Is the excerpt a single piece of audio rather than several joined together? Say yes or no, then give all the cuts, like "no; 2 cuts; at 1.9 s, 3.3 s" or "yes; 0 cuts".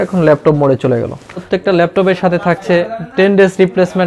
no; 1 cut; at 1.4 s